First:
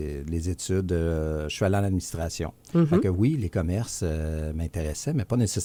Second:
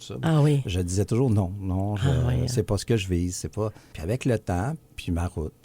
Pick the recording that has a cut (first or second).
second